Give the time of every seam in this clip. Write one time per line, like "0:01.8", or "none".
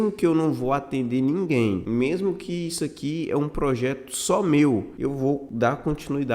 0:01.8
0:05.3